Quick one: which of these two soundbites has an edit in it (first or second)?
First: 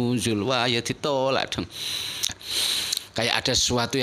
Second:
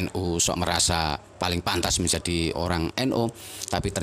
first